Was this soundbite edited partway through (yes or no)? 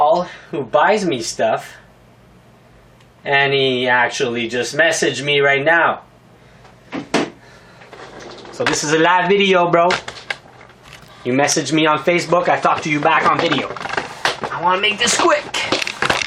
yes